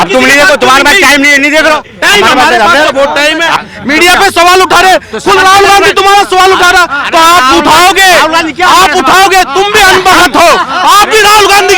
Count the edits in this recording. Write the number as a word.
one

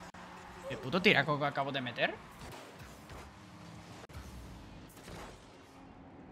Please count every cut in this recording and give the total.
one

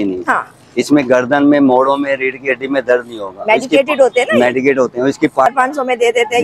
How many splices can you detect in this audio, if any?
one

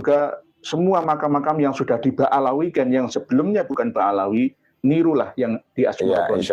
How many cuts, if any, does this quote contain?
zero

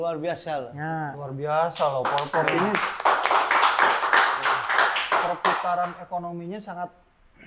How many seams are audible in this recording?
zero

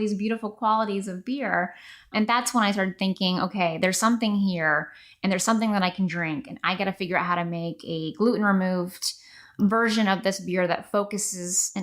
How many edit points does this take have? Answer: one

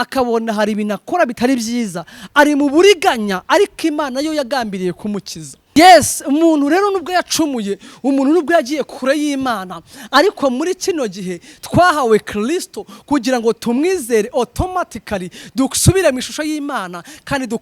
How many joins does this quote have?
one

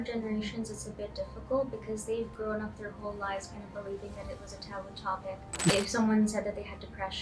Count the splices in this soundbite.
one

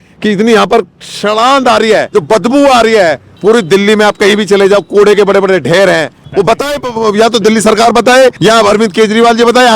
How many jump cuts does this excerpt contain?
four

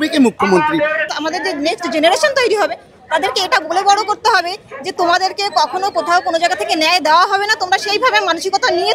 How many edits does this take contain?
one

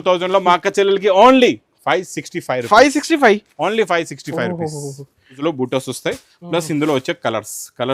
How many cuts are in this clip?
one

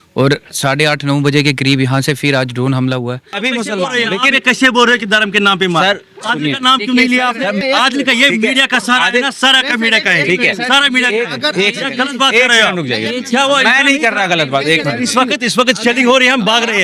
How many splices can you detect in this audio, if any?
one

